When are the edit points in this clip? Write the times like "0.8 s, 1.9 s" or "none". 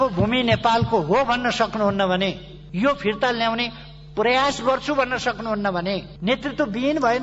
6.1 s